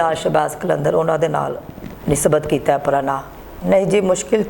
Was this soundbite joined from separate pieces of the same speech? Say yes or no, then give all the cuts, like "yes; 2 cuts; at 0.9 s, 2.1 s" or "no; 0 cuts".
yes; 1 cut; at 3.3 s